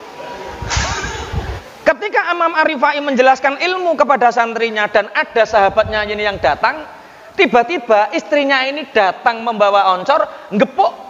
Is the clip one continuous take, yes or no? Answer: no